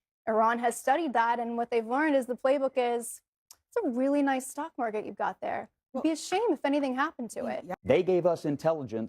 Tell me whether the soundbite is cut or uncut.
cut